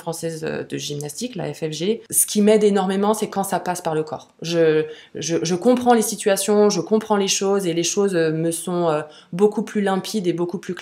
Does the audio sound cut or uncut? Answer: cut